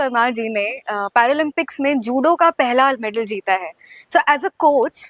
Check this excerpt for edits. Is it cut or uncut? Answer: uncut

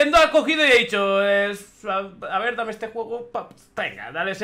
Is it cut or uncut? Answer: uncut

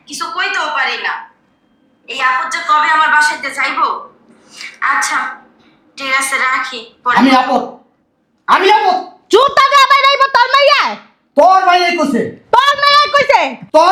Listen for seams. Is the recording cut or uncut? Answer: uncut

